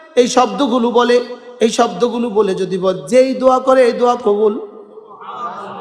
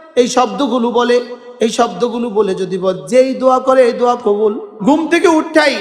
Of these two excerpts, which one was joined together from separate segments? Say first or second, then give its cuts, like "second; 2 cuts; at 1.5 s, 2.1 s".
second; 1 cut; at 4.7 s